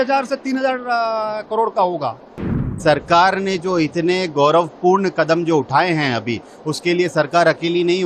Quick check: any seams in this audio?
yes; 1 cut; at 2.4 s

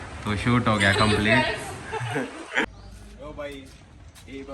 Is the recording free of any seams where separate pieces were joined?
no; 1 cut; at 2.6 s

